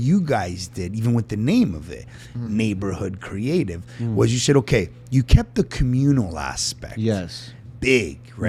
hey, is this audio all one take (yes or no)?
yes